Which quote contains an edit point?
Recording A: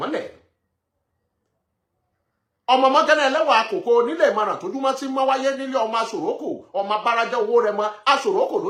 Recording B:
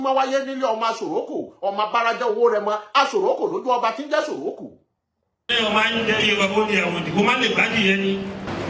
B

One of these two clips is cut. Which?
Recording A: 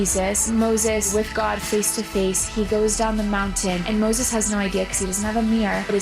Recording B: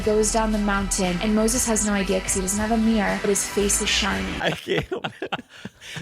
B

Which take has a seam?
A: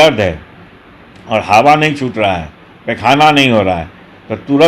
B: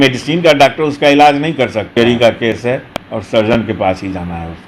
B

